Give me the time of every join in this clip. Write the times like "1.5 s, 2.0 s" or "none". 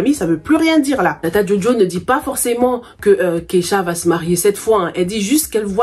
1.1 s